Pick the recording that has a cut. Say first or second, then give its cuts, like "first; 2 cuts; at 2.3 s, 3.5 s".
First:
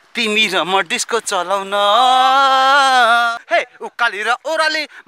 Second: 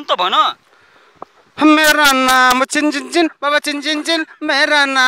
first; 1 cut; at 3.4 s